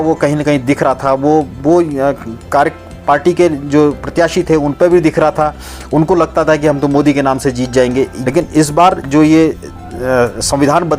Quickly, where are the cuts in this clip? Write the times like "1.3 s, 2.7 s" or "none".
8.2 s

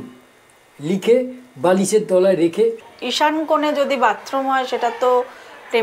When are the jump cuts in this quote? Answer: 2.8 s

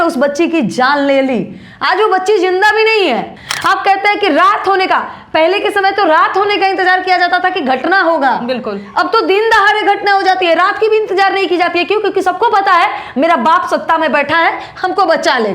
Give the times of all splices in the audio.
3.4 s

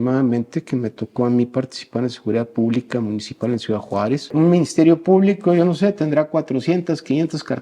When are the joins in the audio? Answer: 4.3 s

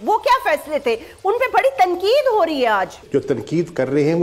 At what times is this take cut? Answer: 3.0 s

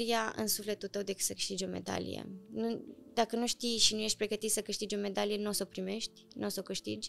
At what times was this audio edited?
none

